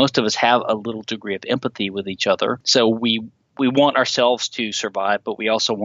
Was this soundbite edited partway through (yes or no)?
yes